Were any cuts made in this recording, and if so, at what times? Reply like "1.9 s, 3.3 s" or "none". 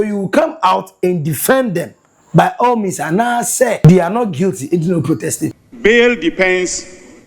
3.8 s, 5.6 s